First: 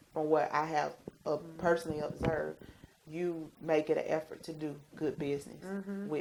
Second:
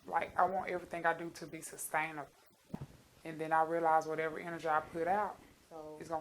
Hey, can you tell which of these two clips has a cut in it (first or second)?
second